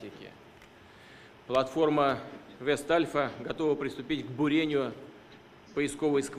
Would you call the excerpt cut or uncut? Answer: cut